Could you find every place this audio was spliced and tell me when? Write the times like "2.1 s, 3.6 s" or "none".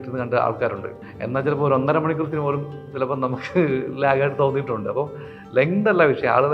1.0 s